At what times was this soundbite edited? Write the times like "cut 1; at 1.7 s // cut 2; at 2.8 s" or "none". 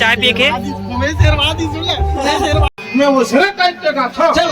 cut 1; at 2.7 s